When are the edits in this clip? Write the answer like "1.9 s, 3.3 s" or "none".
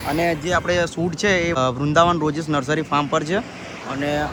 none